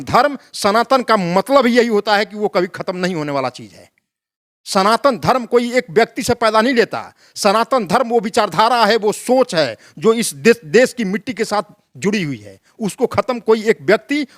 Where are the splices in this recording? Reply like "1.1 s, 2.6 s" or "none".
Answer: none